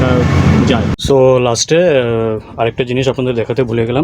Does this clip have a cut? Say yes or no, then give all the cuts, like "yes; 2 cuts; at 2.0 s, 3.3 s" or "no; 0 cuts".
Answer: yes; 1 cut; at 0.9 s